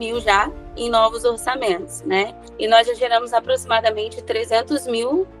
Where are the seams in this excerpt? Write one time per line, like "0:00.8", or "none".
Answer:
0:02.4